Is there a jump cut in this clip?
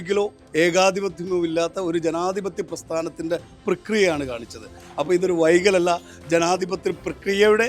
yes; 1 cut; at 4.8 s

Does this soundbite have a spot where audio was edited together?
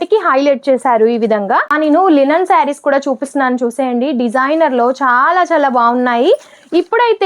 yes; 1 cut; at 1.7 s

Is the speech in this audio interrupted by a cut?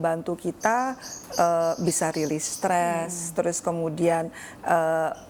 no; 0 cuts

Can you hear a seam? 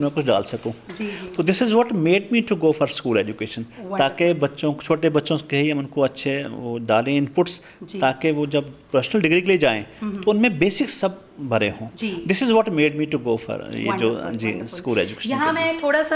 no; 0 cuts

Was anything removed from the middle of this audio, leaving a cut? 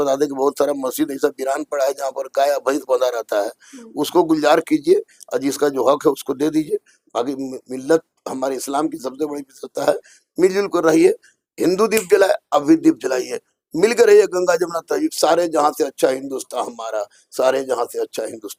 no; 0 cuts

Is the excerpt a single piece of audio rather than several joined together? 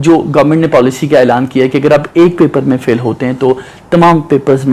yes; 0 cuts

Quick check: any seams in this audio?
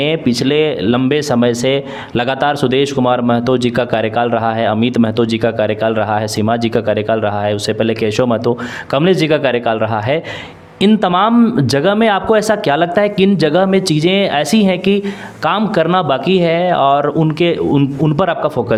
no; 0 cuts

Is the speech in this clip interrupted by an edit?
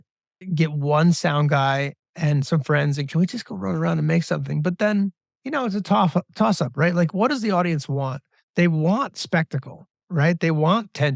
yes; 1 cut; at 5.3 s

